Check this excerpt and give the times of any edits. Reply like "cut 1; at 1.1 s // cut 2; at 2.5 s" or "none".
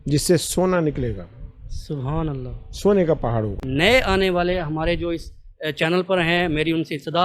cut 1; at 3.6 s